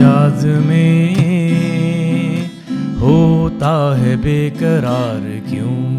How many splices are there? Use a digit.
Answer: 0